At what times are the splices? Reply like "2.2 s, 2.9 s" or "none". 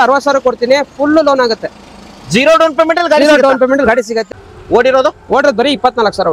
4.2 s